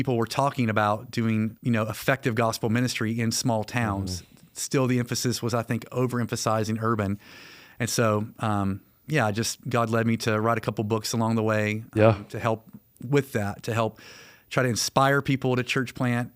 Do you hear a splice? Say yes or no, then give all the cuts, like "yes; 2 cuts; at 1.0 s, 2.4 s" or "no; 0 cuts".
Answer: yes; 1 cut; at 1.6 s